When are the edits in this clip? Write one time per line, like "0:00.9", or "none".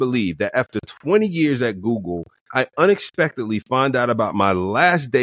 none